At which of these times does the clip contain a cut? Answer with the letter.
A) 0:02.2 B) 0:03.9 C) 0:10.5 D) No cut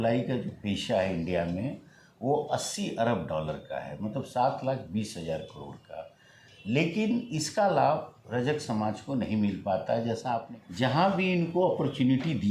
C